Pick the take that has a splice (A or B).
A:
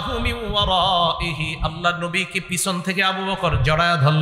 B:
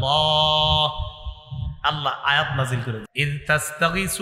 B